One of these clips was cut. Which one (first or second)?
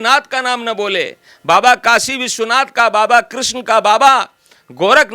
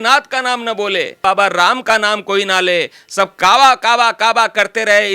second